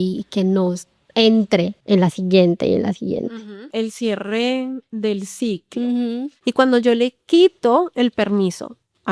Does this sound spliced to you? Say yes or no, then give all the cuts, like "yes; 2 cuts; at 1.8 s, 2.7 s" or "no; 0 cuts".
yes; 3 cuts; at 1.8 s, 3.7 s, 6.4 s